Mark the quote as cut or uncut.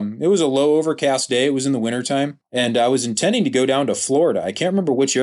cut